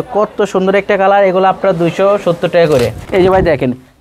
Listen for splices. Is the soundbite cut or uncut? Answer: cut